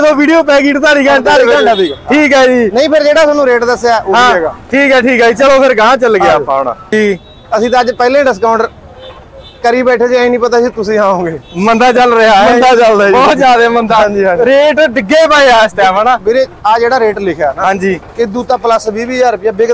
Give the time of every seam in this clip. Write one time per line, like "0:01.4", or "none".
0:06.9